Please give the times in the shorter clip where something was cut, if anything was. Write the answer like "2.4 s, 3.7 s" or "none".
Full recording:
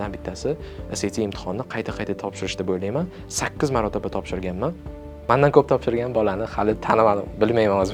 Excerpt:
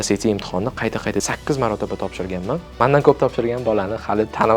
1.2 s, 2.7 s

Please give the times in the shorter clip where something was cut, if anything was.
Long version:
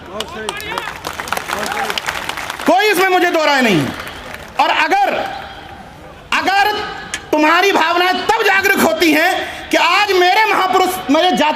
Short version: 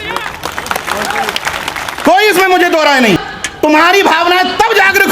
3.2 s

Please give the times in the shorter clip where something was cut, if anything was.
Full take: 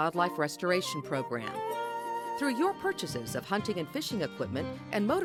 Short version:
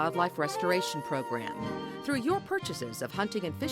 1.5 s

